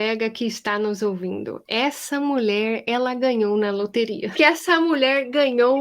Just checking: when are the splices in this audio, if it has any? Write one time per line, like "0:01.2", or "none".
0:04.3

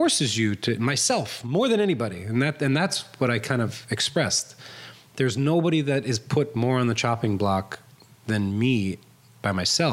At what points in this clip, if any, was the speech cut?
none

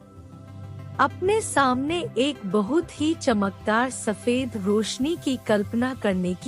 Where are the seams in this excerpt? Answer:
0:01.0

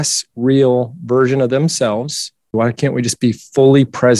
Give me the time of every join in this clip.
0:02.5

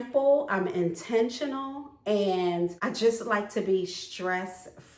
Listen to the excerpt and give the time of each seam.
0:02.8

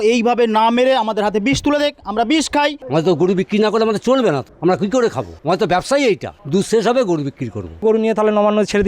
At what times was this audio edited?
0:02.8
0:04.5
0:05.3
0:06.3
0:07.8

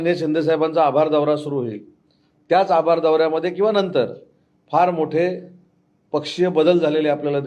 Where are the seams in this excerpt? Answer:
none

